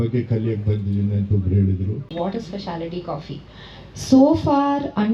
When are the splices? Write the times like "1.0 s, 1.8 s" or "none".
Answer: 2.1 s